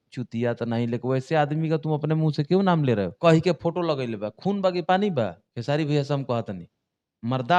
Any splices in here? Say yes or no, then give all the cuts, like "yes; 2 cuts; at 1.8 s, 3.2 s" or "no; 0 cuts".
yes; 2 cuts; at 3.1 s, 5.5 s